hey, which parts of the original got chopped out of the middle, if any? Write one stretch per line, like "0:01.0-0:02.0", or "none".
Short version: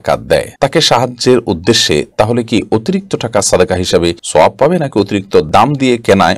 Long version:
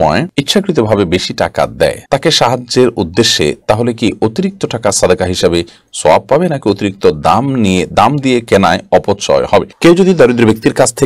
0:05.7-0:05.9
0:07.2-0:07.9

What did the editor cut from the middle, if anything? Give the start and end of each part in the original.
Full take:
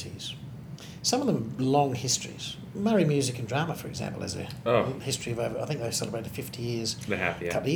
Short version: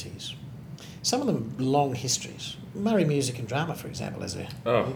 none

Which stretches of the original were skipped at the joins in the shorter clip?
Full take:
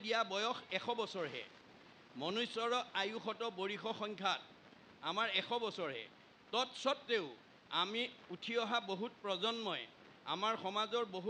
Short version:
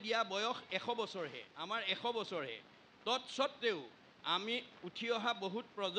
0:01.5-0:04.9

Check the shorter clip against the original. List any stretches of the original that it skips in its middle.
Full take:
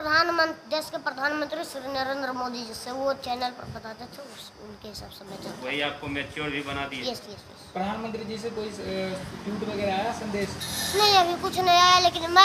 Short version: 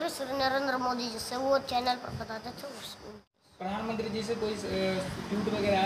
0:04.8-0:07.4

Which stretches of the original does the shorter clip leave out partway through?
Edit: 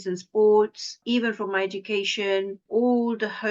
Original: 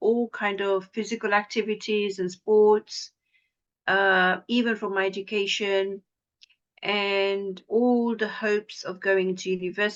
0:03.1-0:04.4
0:06.0-0:07.6

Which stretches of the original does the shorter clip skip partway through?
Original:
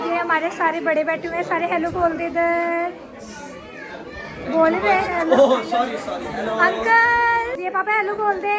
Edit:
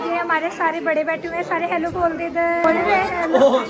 0:02.6-0:04.6

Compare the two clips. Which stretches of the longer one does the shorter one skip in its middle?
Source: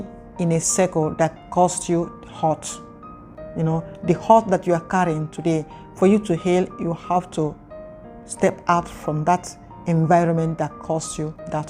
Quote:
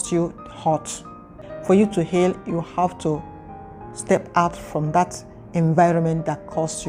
0:03.2-0:05.8

